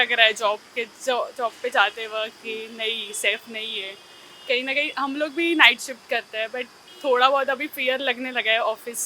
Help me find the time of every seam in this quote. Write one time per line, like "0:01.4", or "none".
none